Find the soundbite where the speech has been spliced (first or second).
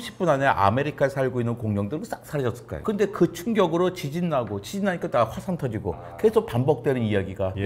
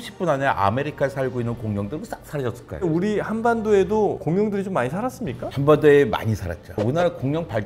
second